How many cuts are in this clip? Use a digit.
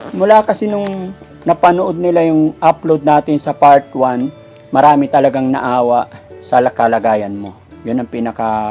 0